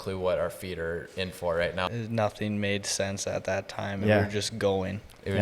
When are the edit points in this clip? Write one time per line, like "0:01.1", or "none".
0:01.9